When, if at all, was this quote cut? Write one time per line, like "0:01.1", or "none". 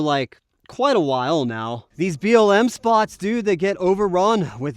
0:01.8